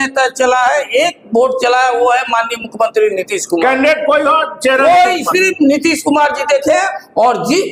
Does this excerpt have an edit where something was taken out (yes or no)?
no